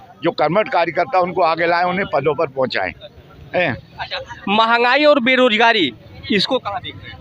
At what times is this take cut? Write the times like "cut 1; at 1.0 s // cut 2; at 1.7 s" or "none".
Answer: none